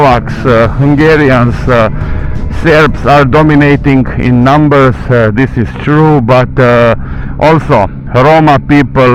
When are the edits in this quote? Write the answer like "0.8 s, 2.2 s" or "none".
none